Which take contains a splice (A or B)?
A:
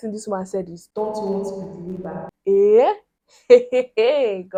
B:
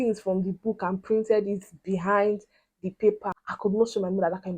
B